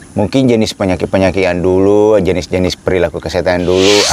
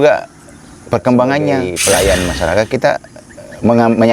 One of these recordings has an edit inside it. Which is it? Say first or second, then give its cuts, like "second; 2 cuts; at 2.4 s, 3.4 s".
second; 1 cut; at 1.7 s